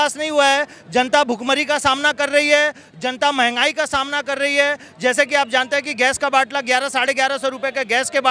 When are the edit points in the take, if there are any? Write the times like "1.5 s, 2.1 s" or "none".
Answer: none